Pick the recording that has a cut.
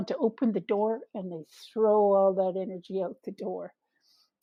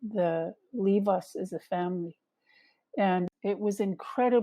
second; 1 cut; at 3.2 s

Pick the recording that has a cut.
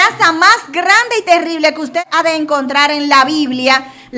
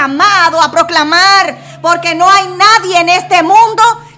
first; 1 cut; at 2.0 s

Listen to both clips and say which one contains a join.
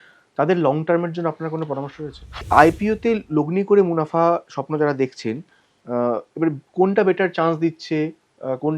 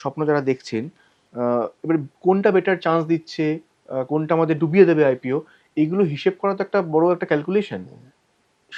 first; 1 cut; at 2.4 s

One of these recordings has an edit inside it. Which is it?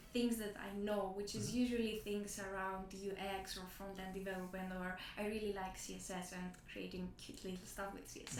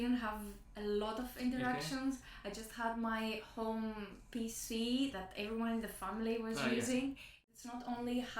second; 1 cut; at 7.3 s

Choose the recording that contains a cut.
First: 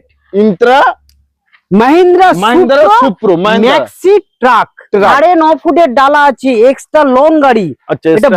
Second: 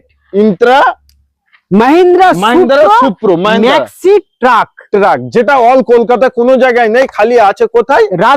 first; 1 cut; at 5.1 s

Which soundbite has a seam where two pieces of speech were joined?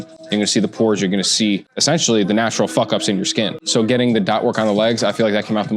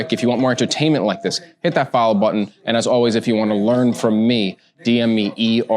first; 2 cuts; at 1.7 s, 3.6 s

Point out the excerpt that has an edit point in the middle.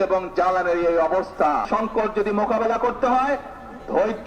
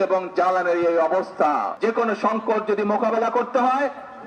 first; 1 cut; at 1.7 s

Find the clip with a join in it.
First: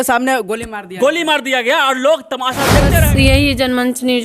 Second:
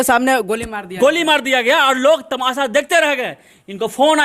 first; 1 cut; at 3.0 s

